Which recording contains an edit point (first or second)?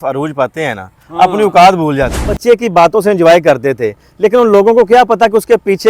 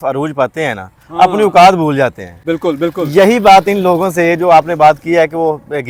first